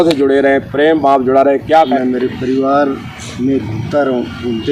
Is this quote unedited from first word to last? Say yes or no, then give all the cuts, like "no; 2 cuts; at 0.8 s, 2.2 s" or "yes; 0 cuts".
no; 1 cut; at 1.9 s